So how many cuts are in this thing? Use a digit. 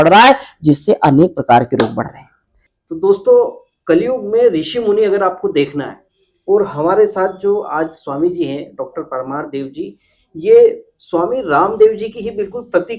1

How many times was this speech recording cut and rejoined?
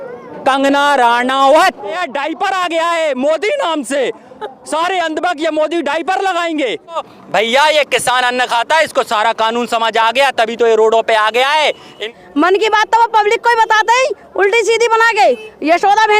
3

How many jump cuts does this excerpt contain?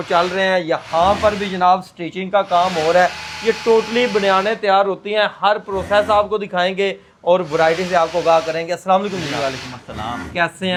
0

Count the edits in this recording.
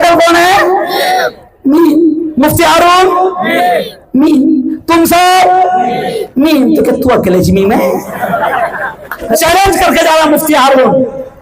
1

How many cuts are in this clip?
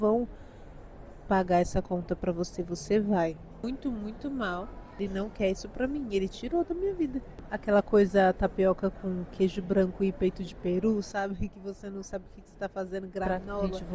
3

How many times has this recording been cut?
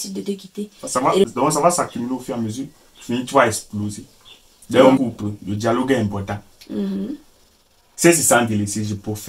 2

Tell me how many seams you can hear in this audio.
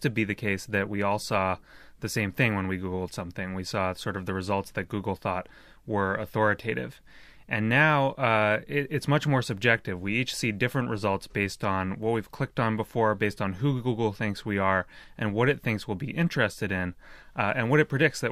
1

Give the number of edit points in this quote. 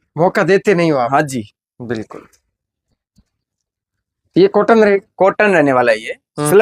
0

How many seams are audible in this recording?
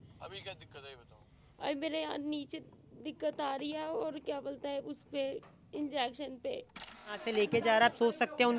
1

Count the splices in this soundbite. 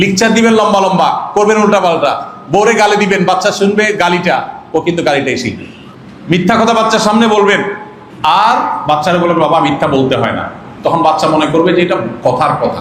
0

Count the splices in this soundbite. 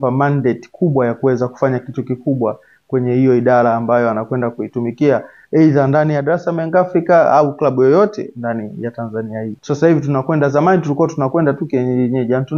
1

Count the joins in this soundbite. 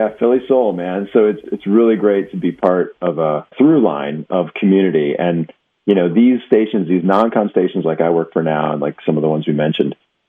2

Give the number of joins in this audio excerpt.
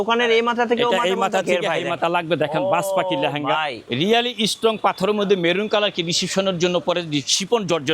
1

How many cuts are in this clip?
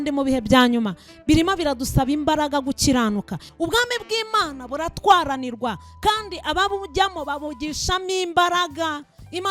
1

